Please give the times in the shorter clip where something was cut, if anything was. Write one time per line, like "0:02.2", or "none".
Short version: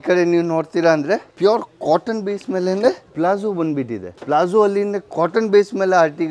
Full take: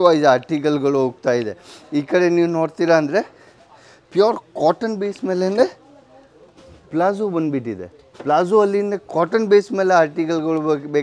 0:01.3
0:03.1
0:04.1